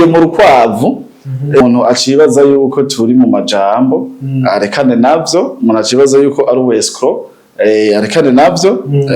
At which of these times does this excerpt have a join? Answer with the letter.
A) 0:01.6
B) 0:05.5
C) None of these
A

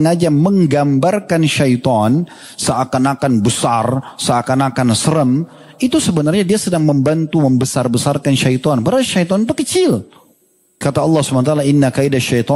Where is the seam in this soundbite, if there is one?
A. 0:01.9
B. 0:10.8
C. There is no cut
B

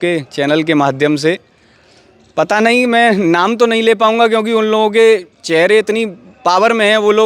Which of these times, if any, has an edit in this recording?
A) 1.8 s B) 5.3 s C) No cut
C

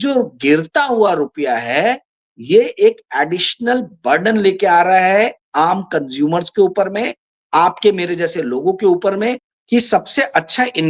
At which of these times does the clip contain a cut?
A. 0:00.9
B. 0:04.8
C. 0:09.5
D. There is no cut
C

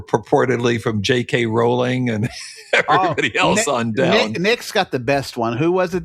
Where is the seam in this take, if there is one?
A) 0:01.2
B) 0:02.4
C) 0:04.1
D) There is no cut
D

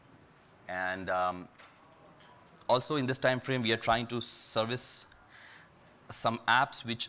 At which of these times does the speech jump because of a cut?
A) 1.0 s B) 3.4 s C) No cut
C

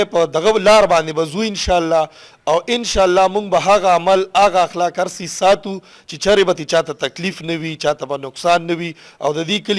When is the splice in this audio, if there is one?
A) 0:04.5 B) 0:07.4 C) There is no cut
C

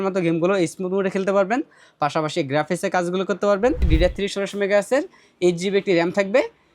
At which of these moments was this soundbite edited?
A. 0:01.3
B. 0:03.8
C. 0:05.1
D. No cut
B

